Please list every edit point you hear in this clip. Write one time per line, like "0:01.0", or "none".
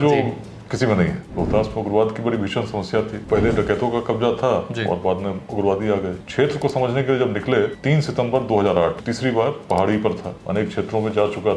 0:01.2
0:03.2
0:06.2
0:07.8
0:09.0
0:10.3